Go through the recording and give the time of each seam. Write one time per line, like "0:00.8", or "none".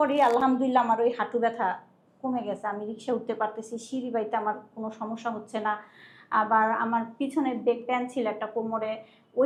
none